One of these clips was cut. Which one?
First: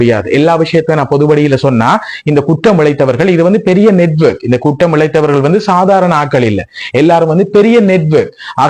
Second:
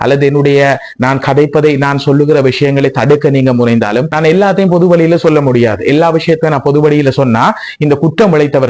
second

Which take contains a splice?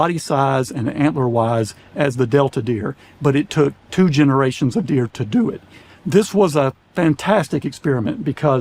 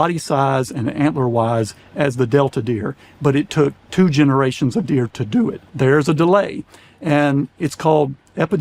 second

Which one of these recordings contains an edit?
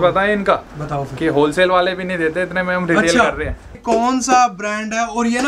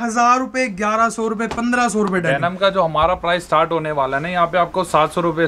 first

